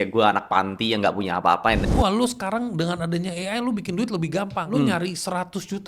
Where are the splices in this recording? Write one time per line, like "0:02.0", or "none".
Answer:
0:01.9
0:04.6